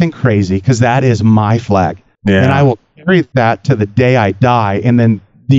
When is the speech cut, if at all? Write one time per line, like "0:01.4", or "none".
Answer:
0:02.1
0:03.3